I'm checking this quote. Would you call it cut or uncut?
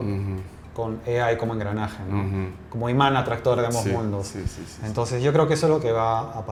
uncut